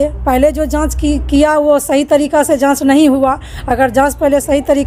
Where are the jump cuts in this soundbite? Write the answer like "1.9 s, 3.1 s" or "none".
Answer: none